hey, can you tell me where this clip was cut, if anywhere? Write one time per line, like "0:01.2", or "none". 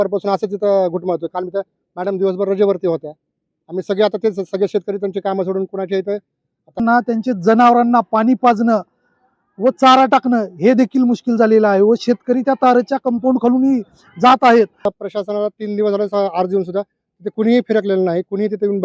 0:06.8
0:14.9